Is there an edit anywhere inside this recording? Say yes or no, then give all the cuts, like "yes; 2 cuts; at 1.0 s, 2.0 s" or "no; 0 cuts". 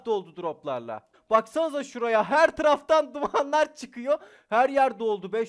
yes; 1 cut; at 1.1 s